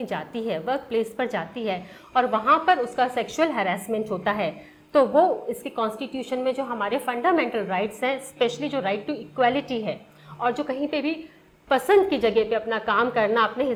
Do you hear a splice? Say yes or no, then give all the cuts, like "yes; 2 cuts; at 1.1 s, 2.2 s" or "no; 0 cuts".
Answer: no; 0 cuts